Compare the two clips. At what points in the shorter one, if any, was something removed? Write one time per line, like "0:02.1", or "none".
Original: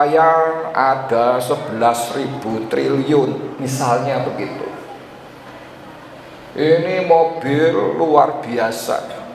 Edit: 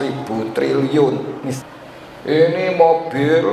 0:01.6